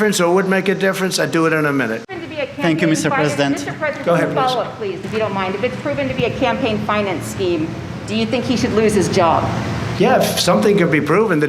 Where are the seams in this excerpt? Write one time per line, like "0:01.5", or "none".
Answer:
0:02.0